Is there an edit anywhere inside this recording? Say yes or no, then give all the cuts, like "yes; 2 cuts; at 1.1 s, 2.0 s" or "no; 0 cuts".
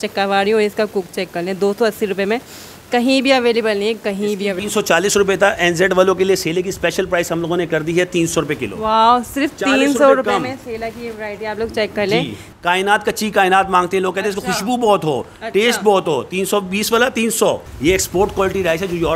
yes; 3 cuts; at 4.6 s, 12.4 s, 17.7 s